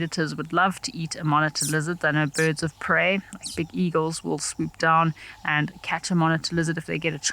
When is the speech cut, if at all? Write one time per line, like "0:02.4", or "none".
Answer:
none